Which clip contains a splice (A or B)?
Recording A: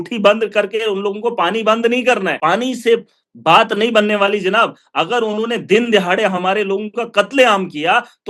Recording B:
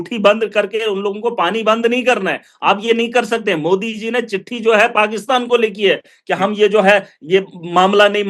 A